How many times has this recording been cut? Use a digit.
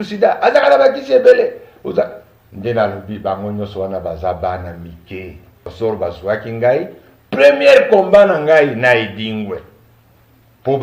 1